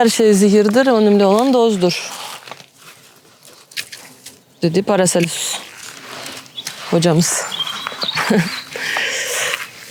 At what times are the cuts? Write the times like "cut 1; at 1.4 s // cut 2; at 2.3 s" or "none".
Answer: none